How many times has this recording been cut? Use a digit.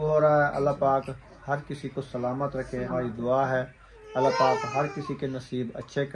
1